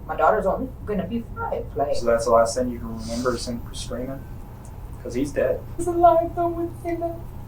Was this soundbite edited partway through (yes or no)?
yes